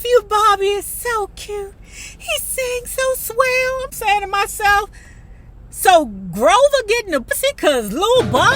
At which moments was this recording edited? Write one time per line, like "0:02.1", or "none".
0:07.3